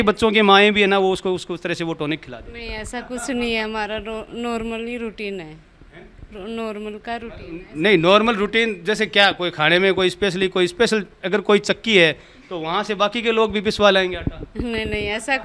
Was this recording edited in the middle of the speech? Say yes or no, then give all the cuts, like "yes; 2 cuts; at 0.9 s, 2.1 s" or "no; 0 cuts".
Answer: no; 0 cuts